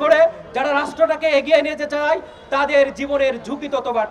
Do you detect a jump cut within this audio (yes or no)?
no